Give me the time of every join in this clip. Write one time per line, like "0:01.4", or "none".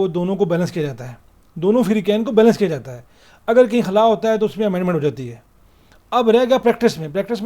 none